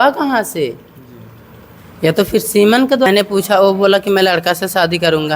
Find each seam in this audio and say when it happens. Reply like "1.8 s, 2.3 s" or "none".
3.1 s